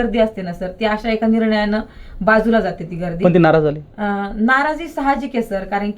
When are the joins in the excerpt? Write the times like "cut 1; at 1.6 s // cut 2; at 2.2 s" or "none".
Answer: none